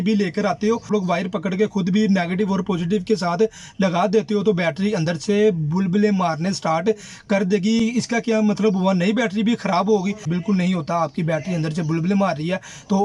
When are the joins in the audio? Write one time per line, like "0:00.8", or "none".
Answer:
none